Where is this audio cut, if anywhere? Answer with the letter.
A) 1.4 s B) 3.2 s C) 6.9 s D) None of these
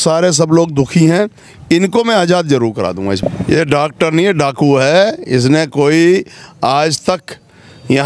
B